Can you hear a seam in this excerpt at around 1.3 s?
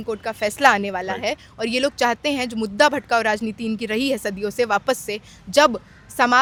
no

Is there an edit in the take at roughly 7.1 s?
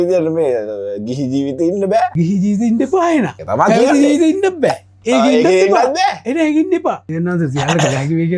yes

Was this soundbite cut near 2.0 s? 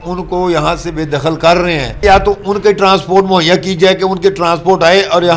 yes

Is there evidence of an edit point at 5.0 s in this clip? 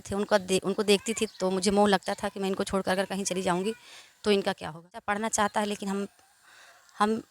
yes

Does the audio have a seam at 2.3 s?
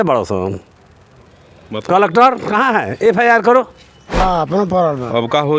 no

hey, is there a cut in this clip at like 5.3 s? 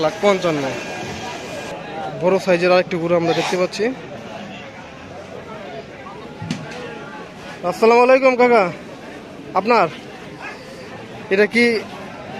no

